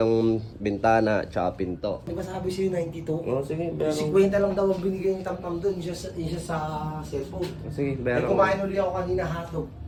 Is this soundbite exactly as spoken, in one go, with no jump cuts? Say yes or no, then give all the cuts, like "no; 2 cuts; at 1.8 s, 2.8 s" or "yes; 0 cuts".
yes; 0 cuts